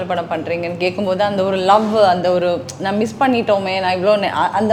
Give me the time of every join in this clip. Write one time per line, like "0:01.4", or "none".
none